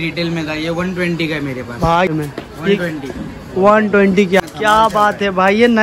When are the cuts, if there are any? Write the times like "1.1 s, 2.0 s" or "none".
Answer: 2.1 s, 4.4 s